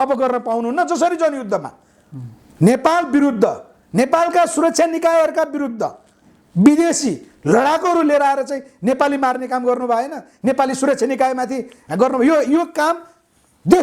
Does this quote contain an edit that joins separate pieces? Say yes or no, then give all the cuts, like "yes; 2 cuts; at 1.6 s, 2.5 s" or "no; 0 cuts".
no; 0 cuts